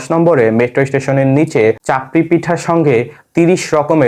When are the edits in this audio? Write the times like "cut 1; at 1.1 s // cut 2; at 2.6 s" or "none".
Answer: none